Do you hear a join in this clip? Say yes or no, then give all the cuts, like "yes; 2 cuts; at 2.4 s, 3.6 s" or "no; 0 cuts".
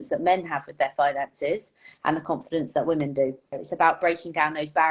yes; 1 cut; at 3.6 s